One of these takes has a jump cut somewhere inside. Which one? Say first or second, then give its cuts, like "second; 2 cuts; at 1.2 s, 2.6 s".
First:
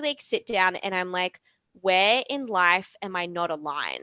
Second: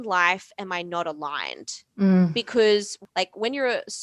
second; 1 cut; at 3.0 s